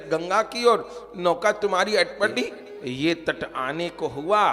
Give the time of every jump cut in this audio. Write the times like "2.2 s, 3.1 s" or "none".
2.7 s